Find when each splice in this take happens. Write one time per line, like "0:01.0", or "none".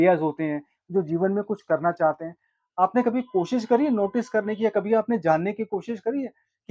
none